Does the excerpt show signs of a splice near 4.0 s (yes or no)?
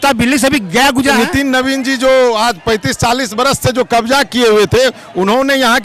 no